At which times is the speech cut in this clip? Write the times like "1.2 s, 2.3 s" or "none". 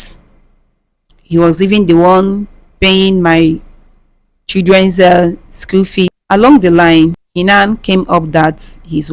6.2 s, 7.2 s